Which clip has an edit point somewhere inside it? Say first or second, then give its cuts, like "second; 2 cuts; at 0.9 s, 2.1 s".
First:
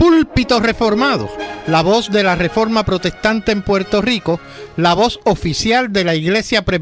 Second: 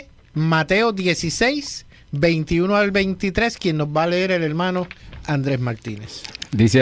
second; 1 cut; at 4.7 s